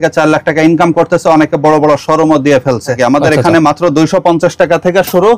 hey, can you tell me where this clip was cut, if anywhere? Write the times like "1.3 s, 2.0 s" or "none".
2.9 s